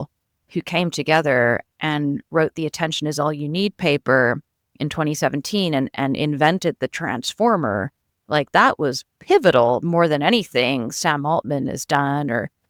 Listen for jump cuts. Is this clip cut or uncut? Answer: uncut